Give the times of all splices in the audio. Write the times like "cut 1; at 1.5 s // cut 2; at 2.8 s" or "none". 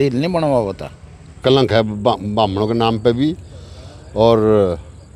cut 1; at 1.3 s